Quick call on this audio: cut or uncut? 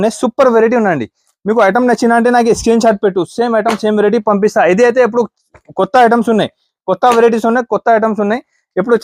uncut